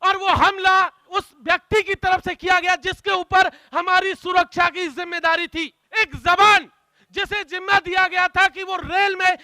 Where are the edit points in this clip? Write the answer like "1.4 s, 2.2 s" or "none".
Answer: 1.1 s, 5.8 s